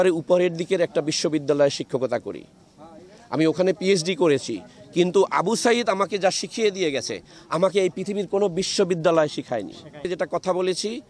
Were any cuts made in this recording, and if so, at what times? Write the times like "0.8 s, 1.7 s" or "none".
10.1 s